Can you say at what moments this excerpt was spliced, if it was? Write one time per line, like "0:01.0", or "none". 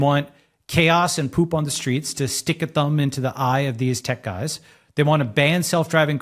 none